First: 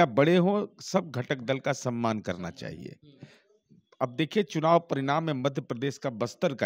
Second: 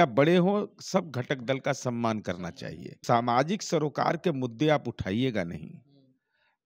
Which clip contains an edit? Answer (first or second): second